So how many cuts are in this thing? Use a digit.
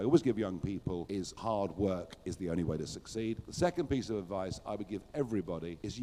2